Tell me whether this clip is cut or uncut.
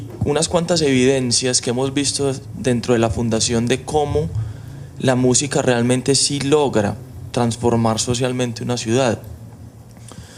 uncut